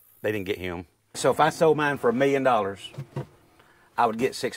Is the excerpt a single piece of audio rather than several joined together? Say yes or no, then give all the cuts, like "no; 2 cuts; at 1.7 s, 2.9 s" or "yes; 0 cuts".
no; 1 cut; at 1.1 s